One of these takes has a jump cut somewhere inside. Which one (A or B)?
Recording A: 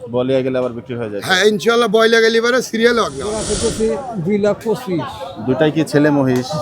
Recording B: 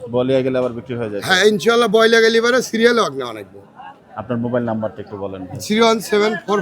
A